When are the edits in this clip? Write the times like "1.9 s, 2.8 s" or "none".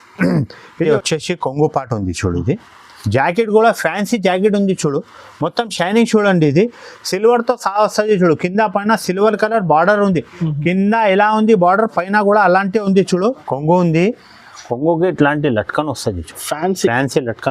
0.9 s, 13.4 s